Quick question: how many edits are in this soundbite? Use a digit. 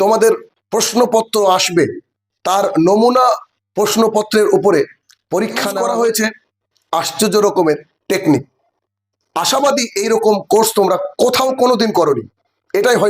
1